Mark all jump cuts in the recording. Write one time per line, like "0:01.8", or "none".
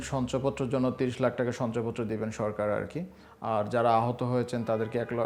none